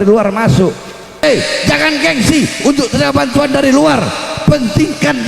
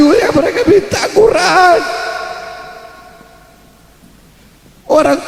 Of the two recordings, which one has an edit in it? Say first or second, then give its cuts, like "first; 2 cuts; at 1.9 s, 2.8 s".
first; 1 cut; at 1.2 s